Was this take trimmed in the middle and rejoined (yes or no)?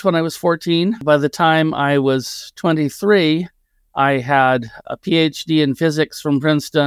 yes